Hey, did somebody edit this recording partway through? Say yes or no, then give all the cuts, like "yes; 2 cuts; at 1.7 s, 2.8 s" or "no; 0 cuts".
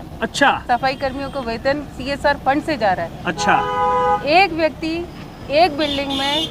no; 0 cuts